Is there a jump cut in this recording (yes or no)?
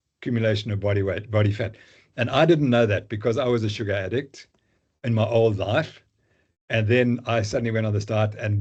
no